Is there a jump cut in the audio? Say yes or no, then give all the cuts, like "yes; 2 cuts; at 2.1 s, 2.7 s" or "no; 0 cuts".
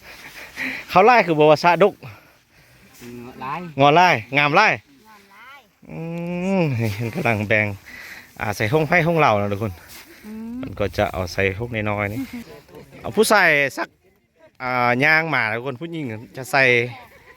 yes; 1 cut; at 12.4 s